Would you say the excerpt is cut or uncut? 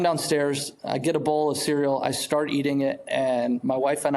uncut